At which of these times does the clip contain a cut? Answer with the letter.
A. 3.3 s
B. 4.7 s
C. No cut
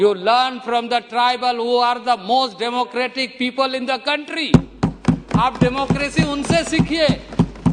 C